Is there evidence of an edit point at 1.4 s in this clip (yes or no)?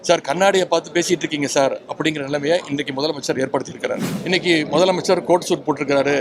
no